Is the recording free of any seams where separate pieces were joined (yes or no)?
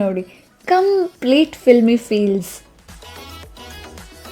no